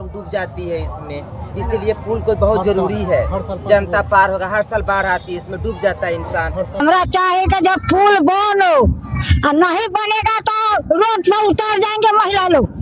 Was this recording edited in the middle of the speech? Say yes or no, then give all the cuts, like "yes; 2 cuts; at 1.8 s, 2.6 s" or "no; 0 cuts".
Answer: yes; 1 cut; at 6.8 s